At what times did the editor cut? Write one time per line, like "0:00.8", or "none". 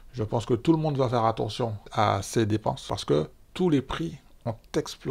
0:01.8
0:02.8

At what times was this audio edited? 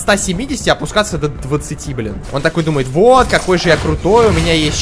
0:02.2

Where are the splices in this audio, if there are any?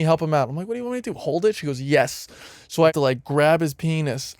0:02.9

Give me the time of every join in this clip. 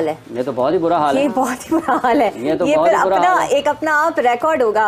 none

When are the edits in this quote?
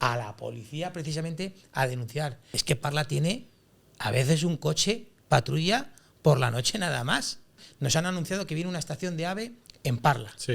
0:02.5
0:07.7

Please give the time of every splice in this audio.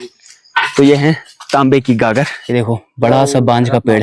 0:02.4

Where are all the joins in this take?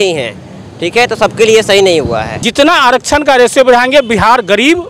0:02.4

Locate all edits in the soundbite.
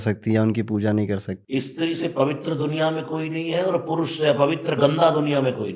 0:01.3

